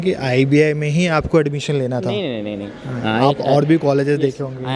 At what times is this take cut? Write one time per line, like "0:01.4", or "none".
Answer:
none